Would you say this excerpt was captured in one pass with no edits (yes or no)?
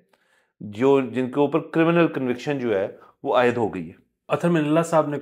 no